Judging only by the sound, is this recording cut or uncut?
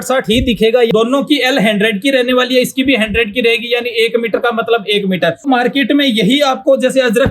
cut